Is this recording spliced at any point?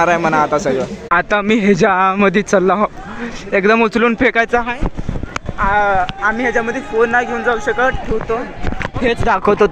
yes; 1 cut; at 1.0 s

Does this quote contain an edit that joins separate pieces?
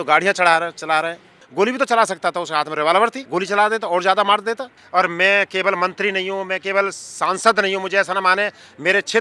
yes; 3 cuts; at 1.4 s, 3.2 s, 4.7 s

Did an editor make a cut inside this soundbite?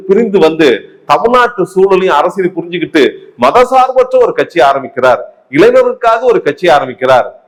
no; 0 cuts

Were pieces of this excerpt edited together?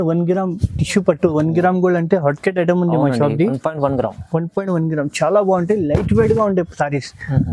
no; 0 cuts

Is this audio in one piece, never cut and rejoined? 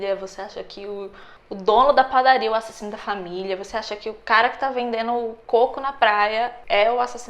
yes; 0 cuts

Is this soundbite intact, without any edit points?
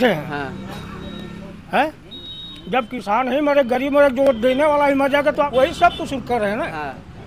no; 1 cut; at 5.5 s

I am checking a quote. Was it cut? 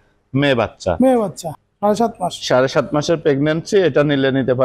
yes; 1 cut; at 1.4 s

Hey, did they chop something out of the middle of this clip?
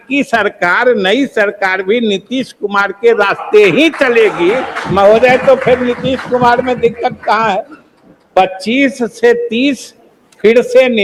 no; 0 cuts

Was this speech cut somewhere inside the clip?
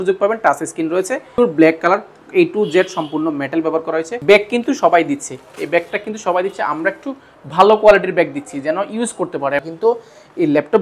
yes; 3 cuts; at 1.4 s, 4.1 s, 9.7 s

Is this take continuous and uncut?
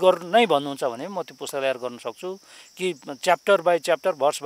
yes; 0 cuts

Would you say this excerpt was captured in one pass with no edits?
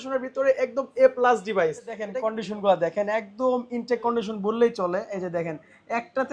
no; 1 cut; at 2.0 s

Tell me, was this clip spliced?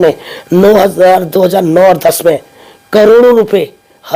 no; 0 cuts

